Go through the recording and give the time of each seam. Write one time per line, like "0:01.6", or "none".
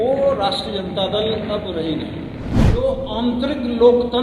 0:02.6